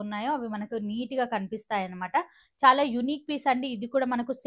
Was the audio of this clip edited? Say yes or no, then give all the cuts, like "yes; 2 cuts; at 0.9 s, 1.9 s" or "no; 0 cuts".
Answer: no; 0 cuts